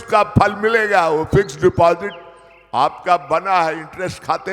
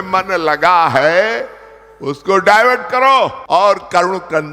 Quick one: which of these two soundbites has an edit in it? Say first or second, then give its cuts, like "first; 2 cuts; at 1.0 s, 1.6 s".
second; 1 cut; at 3.4 s